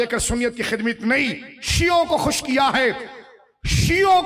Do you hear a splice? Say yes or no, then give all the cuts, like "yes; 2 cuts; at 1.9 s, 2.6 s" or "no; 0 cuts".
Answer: no; 0 cuts